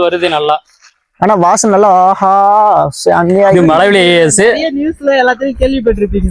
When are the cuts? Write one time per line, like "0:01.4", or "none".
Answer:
0:03.5